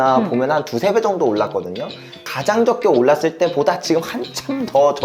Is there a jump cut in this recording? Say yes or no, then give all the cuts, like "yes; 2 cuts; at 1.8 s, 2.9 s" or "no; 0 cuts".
yes; 1 cut; at 2.3 s